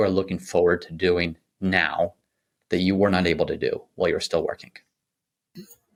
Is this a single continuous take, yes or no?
yes